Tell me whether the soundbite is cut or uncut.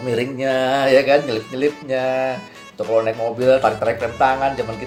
uncut